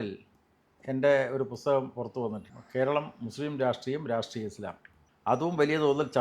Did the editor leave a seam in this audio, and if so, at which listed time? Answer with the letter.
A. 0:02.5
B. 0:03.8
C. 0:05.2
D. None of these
A